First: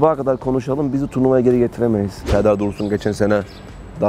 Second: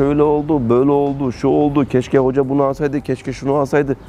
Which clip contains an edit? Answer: first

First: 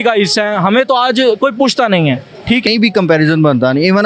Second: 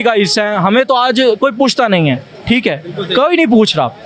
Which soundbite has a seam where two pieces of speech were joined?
first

